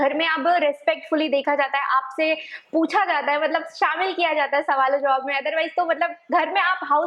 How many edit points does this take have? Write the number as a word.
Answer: zero